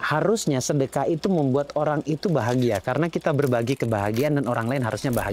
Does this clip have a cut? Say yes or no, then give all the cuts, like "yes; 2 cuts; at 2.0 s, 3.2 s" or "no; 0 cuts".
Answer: no; 0 cuts